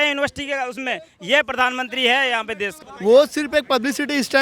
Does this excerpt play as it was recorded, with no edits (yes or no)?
no